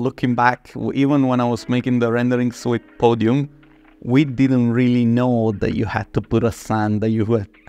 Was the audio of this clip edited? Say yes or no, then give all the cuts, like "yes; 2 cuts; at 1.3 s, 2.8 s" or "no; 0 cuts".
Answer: no; 0 cuts